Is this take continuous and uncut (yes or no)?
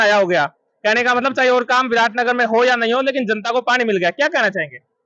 yes